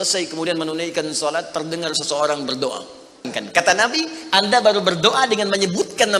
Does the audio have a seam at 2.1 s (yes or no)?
no